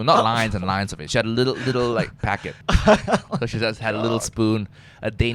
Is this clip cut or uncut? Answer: cut